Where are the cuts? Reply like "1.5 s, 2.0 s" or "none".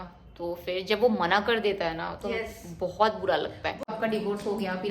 3.9 s